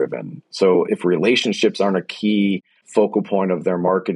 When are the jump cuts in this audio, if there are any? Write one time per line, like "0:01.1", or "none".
0:00.9
0:02.7